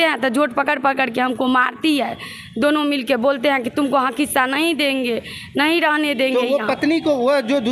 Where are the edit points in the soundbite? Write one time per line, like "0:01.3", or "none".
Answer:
none